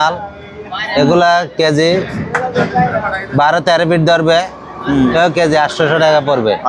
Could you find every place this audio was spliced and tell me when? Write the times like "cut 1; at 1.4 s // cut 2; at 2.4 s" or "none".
none